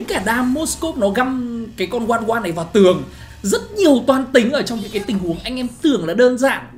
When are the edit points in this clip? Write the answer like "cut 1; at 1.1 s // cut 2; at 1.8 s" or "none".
cut 1; at 3.2 s

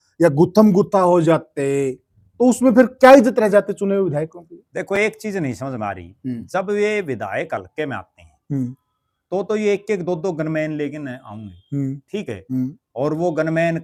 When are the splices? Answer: none

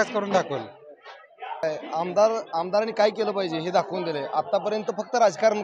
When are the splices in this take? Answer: cut 1; at 1.6 s

